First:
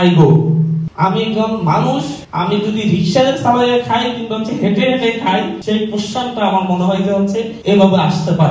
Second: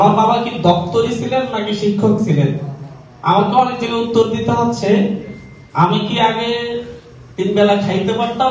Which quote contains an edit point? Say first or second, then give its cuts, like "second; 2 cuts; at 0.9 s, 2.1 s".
first; 4 cuts; at 0.9 s, 2.2 s, 5.6 s, 7.5 s